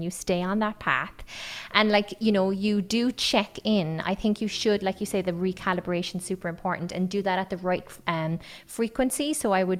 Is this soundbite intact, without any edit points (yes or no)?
yes